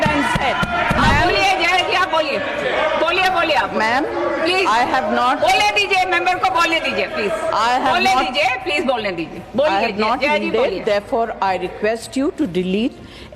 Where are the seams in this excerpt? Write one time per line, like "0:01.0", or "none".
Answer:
0:01.0